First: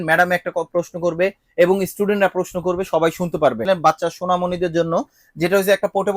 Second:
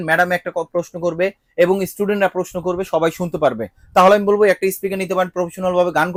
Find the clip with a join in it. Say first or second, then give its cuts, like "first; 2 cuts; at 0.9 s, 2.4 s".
first; 1 cut; at 3.6 s